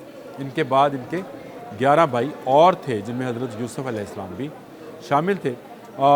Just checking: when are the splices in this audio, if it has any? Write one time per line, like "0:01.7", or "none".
none

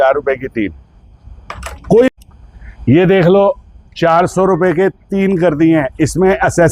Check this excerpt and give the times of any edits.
0:02.1

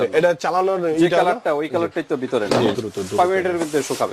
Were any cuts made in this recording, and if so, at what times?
0:02.8

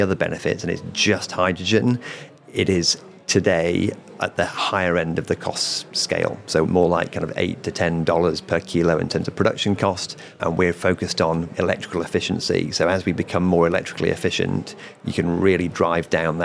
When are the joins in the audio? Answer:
0:06.6
0:10.4
0:11.5

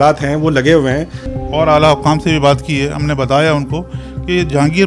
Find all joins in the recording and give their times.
0:01.3

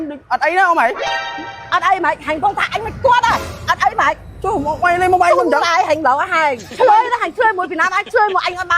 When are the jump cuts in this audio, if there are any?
0:06.6

